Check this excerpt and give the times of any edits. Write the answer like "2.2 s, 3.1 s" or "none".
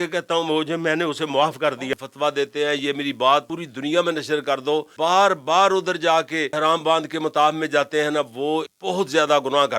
1.9 s, 3.6 s, 4.9 s, 6.5 s, 8.7 s